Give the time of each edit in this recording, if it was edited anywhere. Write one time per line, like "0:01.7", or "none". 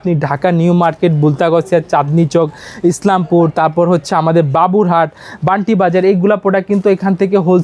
none